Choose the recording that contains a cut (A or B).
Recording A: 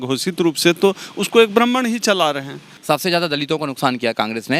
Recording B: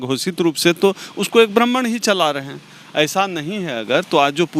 A